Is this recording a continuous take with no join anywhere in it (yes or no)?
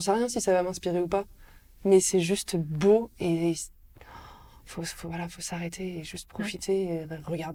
yes